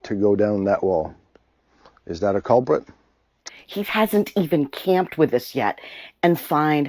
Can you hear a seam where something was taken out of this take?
yes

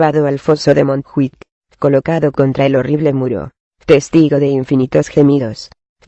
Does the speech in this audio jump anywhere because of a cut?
yes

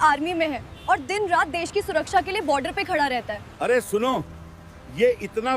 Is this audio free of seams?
no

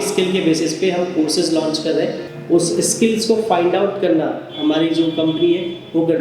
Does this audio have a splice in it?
yes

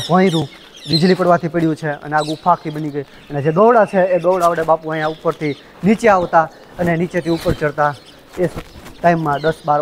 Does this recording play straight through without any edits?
yes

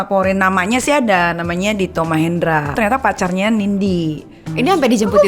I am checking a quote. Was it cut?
yes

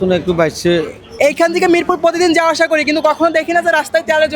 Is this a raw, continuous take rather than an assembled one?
no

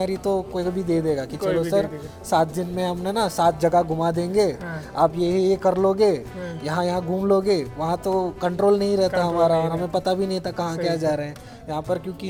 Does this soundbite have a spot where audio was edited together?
no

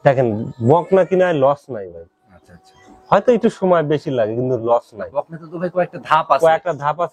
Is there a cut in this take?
no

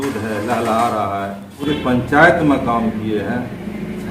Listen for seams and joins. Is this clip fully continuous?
no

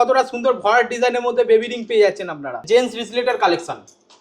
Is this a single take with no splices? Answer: no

